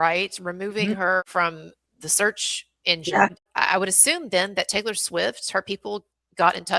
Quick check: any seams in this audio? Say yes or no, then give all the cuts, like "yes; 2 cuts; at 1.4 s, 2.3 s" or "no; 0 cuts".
yes; 2 cuts; at 1.3 s, 3.5 s